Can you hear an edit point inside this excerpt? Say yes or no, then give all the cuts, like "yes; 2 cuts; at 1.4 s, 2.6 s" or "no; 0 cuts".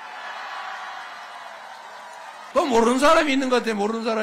yes; 1 cut; at 2.5 s